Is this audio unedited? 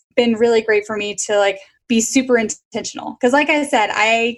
yes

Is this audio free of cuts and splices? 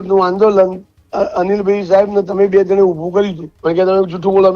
no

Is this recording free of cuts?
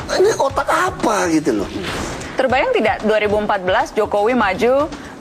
no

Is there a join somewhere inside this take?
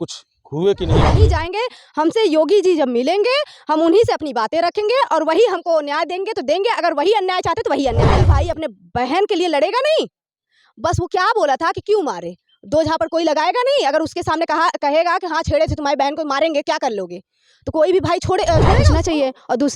yes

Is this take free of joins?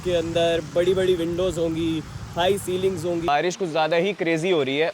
no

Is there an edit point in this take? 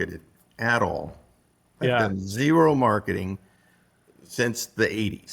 no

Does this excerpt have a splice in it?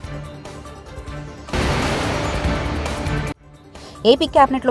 yes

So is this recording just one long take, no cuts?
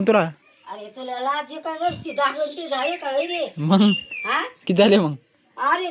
yes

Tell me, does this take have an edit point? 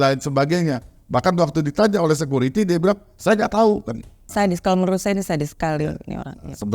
yes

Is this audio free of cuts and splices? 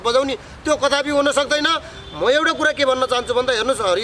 yes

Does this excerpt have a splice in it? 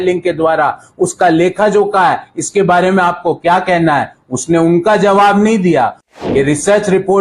yes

